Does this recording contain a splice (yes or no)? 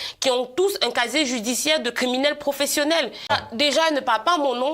yes